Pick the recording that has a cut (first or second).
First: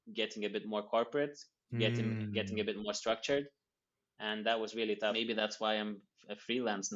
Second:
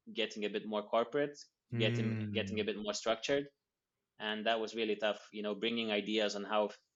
first